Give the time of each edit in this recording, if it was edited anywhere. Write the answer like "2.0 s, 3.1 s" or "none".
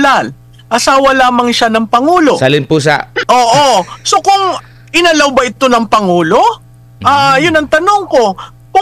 3.1 s

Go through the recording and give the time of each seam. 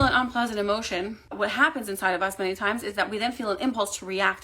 1.2 s

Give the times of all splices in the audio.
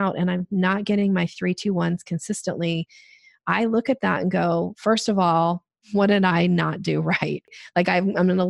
5.7 s, 7.5 s

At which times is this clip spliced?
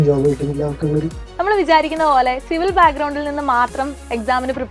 1.2 s

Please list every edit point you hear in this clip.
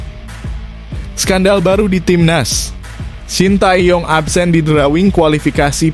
1.3 s

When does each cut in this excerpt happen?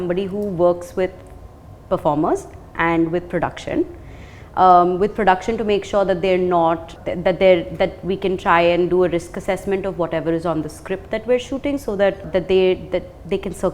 none

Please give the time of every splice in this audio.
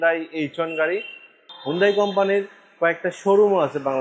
1.5 s

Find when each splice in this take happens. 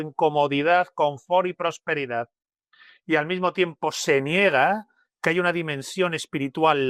none

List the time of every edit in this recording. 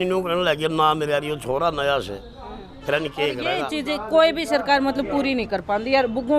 3.6 s

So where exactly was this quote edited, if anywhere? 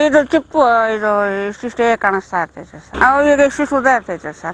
2.8 s

